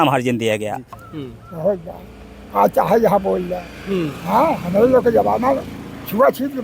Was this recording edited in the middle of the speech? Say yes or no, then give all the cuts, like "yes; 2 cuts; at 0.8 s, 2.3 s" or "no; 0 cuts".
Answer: yes; 1 cut; at 1.0 s